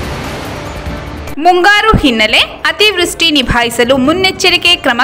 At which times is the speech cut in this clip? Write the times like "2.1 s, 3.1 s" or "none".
1.2 s